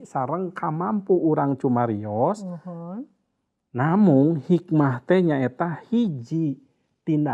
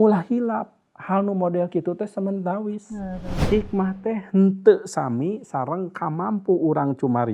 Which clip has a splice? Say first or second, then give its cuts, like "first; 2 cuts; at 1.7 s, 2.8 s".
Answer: second; 1 cut; at 3.3 s